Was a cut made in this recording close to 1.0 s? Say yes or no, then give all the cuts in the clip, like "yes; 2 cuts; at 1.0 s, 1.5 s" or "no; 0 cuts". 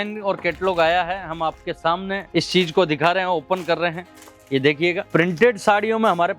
no; 2 cuts; at 2.2 s, 5.0 s